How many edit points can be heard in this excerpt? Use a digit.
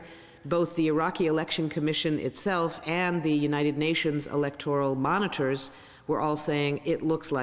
1